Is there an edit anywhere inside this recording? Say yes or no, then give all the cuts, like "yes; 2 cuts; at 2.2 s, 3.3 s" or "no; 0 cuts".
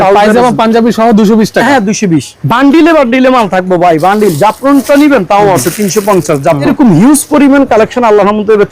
yes; 2 cuts; at 2.3 s, 6.7 s